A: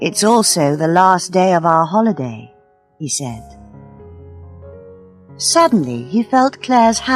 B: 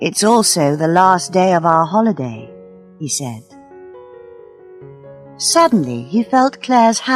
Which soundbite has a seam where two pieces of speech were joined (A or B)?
A